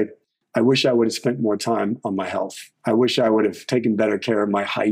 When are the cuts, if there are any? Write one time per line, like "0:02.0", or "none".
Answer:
0:02.7